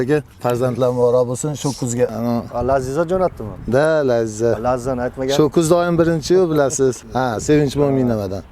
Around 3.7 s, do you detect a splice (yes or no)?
no